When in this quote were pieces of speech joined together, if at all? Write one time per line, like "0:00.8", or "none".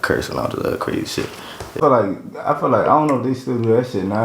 0:01.8